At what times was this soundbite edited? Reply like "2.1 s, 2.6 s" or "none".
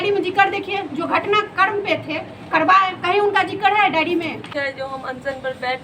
4.5 s

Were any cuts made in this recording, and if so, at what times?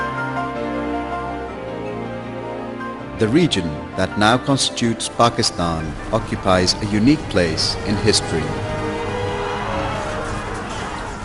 1.5 s

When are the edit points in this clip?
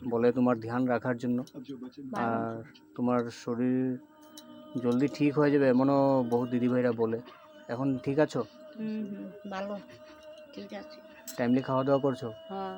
none

